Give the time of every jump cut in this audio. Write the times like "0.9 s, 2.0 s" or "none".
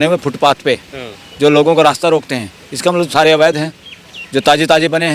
none